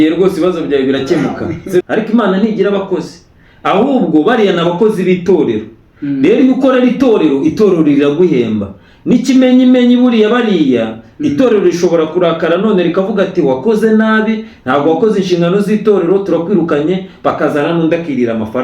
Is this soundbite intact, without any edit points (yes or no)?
no